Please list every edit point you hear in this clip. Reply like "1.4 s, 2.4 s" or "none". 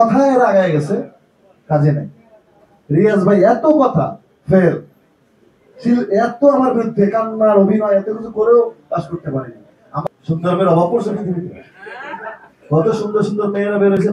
10.1 s